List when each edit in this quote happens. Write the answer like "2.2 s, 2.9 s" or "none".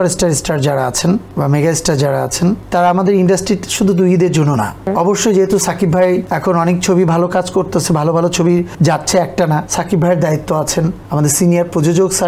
1.3 s, 2.6 s, 4.8 s, 6.3 s, 8.7 s, 9.7 s, 11.0 s